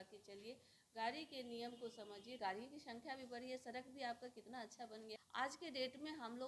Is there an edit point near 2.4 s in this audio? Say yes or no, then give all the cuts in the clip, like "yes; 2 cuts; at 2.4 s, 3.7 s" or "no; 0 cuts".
yes; 2 cuts; at 2.4 s, 5.1 s